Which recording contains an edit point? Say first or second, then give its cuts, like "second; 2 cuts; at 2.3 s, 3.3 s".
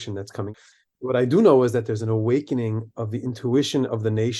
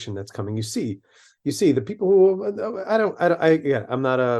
first; 1 cut; at 1.0 s